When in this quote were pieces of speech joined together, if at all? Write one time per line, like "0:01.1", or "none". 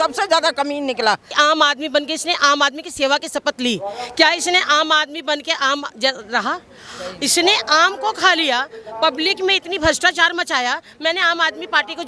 0:01.3

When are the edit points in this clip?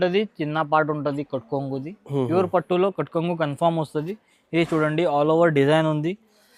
none

